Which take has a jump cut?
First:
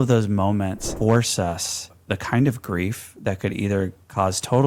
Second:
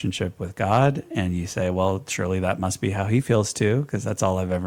first; 2 cuts; at 0.8 s, 2.0 s

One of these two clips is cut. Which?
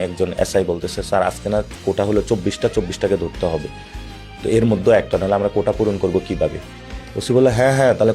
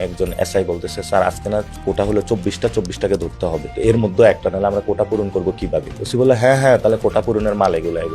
second; 2 cuts; at 3.7 s, 6.0 s

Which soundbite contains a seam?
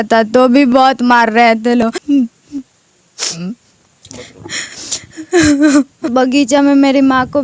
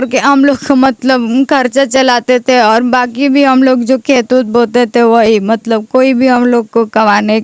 first; 2 cuts; at 2.0 s, 6.1 s

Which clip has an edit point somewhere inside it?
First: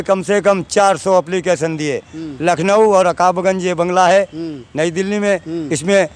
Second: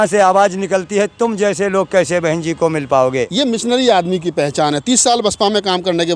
second; 1 cut; at 3.3 s

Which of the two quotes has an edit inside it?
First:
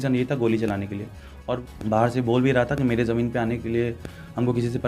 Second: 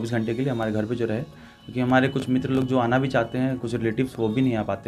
first; 1 cut; at 1.6 s

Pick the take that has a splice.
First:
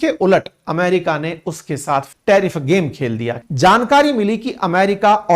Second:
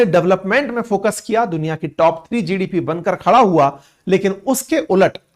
first; 2 cuts; at 2.1 s, 3.4 s

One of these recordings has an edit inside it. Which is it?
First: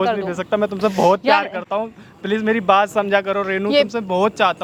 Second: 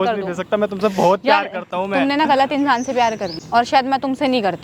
second; 2 cuts; at 1.7 s, 3.3 s

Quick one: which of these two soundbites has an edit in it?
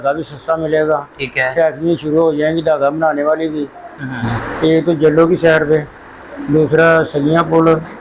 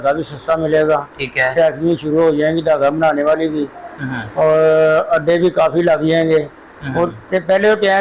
first; 1 cut; at 4.2 s

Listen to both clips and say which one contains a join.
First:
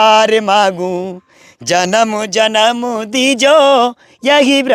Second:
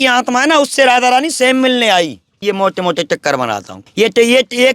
second; 2 cuts; at 2.3 s, 3.8 s

